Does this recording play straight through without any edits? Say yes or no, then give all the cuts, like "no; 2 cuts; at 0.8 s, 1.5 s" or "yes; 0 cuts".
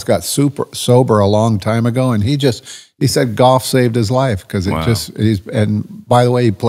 yes; 0 cuts